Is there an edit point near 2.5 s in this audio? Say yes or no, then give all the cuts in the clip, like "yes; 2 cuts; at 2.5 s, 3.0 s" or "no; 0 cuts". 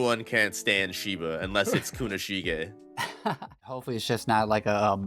no; 1 cut; at 3.8 s